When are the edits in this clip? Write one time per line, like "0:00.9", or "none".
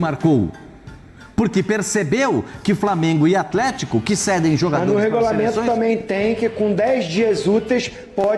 none